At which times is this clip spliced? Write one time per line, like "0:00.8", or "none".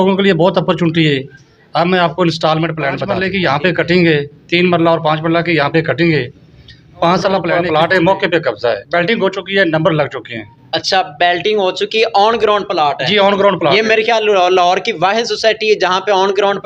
0:03.2
0:07.6